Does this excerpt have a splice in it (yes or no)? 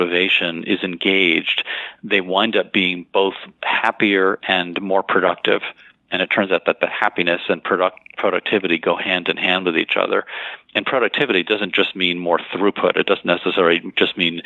no